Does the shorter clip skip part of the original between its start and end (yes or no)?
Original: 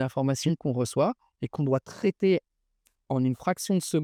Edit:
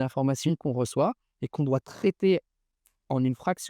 no